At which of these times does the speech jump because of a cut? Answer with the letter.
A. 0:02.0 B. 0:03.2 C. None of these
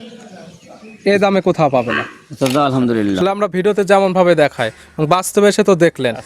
B